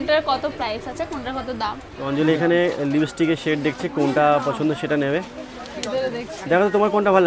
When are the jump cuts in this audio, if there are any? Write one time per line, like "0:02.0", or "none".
0:01.9